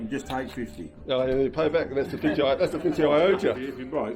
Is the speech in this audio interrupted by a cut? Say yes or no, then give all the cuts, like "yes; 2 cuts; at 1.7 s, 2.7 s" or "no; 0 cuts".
no; 0 cuts